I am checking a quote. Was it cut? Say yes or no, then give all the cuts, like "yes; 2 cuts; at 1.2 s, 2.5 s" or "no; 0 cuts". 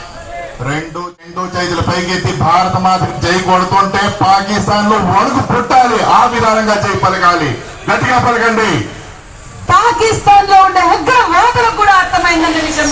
yes; 2 cuts; at 0.9 s, 9.5 s